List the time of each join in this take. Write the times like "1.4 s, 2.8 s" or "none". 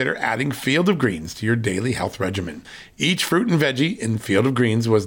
none